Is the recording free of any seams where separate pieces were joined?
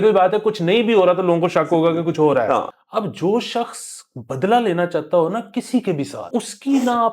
no; 2 cuts; at 2.8 s, 6.3 s

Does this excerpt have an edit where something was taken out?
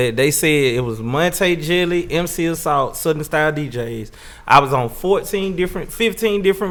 no; 0 cuts

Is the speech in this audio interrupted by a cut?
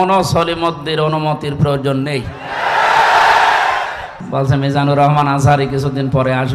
yes; 1 cut; at 4.2 s

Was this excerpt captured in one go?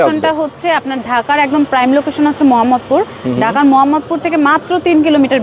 yes; 0 cuts

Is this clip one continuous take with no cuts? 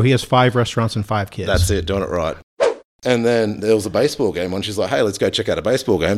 no; 1 cut; at 2.8 s

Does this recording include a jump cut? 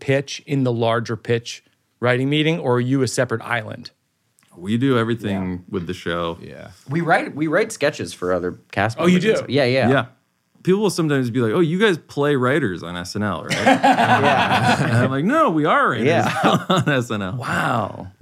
yes; 1 cut; at 10.5 s

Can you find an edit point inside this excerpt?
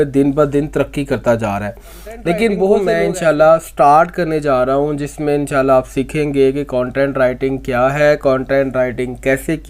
yes; 1 cut; at 2.8 s

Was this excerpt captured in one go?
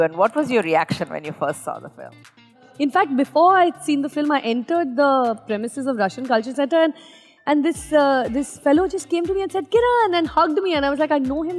no; 1 cut; at 2.6 s

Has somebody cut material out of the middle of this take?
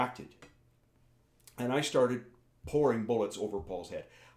no; 0 cuts

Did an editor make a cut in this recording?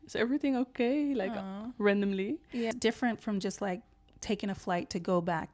yes; 1 cut; at 2.7 s

